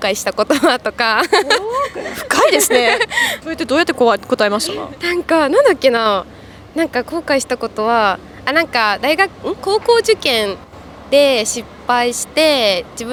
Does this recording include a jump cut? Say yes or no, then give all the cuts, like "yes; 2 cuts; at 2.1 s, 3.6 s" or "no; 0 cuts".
no; 0 cuts